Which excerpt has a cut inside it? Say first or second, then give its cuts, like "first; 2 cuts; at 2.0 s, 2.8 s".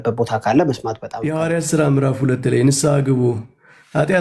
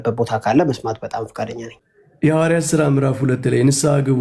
first; 1 cut; at 1.1 s